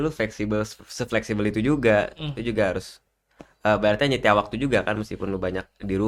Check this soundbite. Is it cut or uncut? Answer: uncut